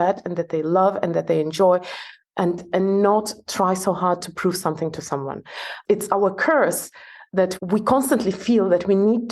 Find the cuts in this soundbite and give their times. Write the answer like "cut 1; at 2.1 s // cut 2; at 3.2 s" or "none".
cut 1; at 5.7 s // cut 2; at 7.5 s